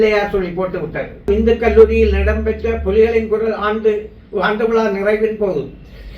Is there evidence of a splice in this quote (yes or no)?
yes